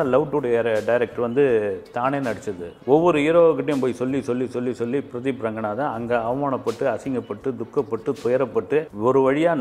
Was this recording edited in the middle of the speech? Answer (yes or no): yes